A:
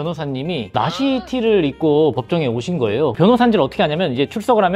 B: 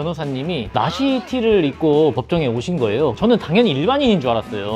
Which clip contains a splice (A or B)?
B